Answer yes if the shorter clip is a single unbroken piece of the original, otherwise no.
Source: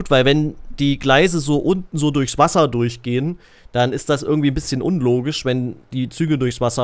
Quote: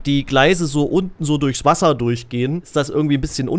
no